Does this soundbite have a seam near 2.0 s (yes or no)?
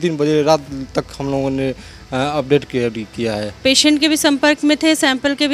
no